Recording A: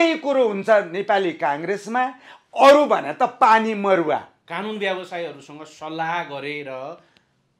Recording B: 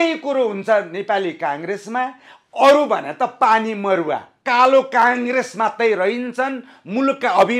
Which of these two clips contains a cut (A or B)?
B